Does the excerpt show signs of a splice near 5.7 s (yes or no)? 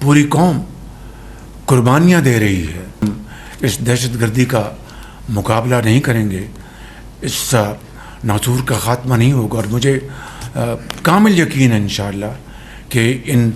no